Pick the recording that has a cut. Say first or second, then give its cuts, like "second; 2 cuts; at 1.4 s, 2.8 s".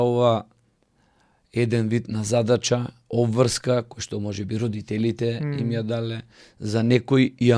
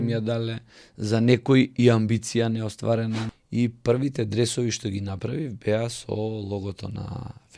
second; 1 cut; at 3.3 s